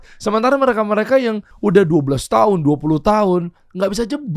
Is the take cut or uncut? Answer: cut